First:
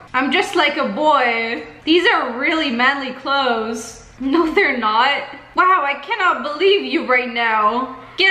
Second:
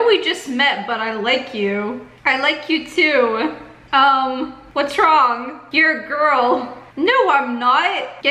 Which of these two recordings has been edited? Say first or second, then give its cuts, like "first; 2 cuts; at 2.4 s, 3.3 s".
second; 3 cuts; at 2.1 s, 3.8 s, 4.6 s